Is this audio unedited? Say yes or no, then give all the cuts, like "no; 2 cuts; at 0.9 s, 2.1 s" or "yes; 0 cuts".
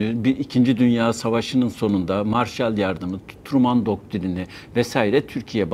yes; 0 cuts